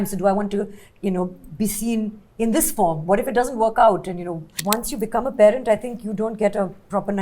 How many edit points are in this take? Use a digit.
1